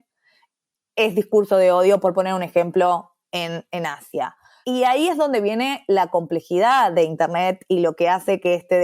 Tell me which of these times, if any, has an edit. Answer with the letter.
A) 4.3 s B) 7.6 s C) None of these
A